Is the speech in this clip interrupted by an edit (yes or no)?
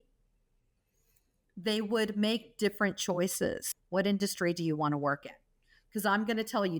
yes